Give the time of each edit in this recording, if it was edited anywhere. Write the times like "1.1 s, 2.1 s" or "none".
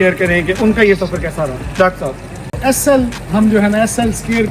2.6 s

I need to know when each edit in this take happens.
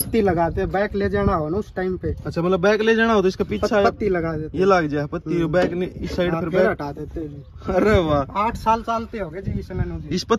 none

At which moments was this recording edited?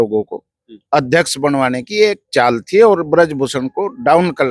none

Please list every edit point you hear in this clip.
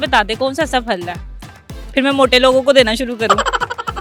none

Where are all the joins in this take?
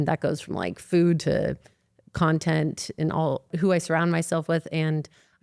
3.5 s

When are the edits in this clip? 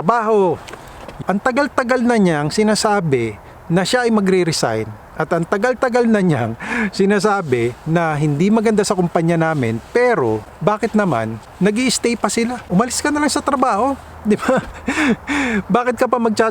1.1 s, 10.5 s, 11.4 s, 12.6 s

